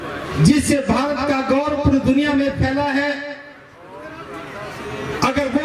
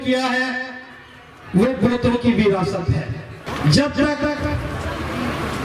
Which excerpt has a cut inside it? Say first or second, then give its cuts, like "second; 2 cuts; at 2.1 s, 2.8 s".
second; 1 cut; at 3.4 s